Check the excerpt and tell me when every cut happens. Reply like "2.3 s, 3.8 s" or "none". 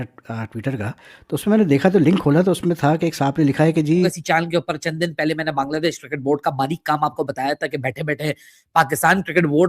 4.2 s